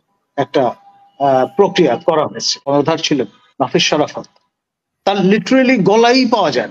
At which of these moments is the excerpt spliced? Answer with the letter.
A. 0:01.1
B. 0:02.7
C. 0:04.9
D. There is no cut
B